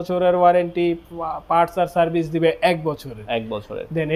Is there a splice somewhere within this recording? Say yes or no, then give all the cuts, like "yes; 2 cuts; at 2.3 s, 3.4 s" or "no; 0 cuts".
no; 0 cuts